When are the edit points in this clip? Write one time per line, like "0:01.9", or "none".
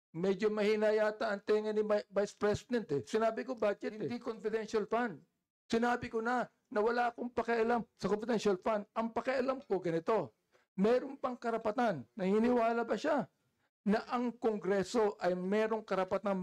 0:04.2